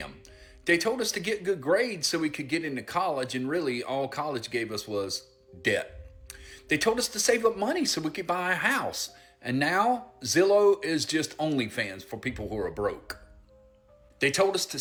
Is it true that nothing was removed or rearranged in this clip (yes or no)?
yes